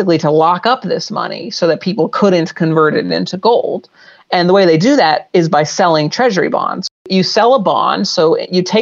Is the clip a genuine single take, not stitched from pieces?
no; 1 cut; at 6.8 s

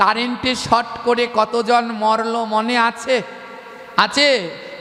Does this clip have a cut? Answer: no; 0 cuts

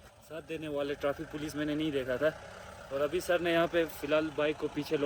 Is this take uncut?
yes; 0 cuts

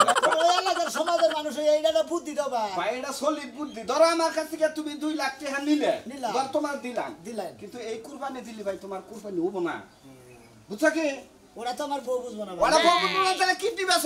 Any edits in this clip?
no; 0 cuts

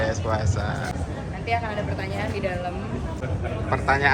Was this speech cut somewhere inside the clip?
yes; 2 cuts; at 0.9 s, 3.3 s

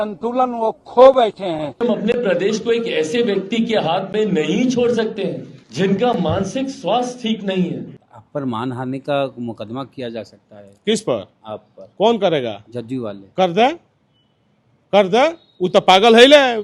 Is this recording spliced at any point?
yes; 2 cuts; at 1.8 s, 7.9 s

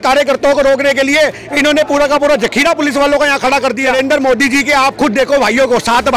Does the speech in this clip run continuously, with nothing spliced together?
no; 1 cut; at 3.9 s

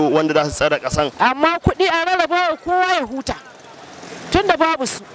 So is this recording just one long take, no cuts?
no; 1 cut; at 1.1 s

